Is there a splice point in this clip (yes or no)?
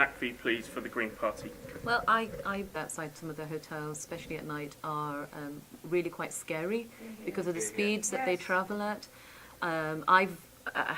no